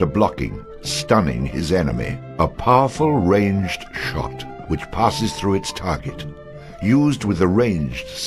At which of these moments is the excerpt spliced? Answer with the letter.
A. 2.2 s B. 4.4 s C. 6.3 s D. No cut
A